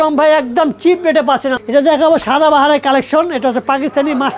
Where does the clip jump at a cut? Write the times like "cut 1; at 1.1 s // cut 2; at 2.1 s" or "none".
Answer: cut 1; at 1.5 s

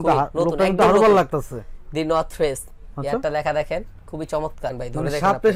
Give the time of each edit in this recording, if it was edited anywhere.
none

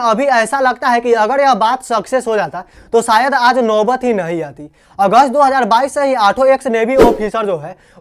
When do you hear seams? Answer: none

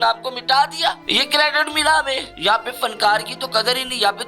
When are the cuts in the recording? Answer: cut 1; at 1.0 s // cut 2; at 2.3 s

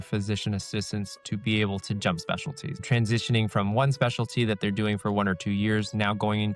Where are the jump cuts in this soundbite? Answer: cut 1; at 2.8 s

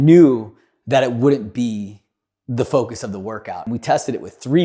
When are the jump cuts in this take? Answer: cut 1; at 3.5 s

